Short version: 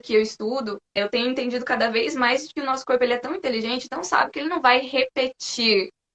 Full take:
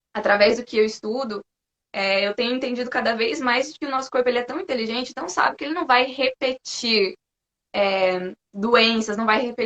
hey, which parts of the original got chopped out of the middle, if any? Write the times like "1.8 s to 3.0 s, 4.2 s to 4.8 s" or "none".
1.6 s to 2.2 s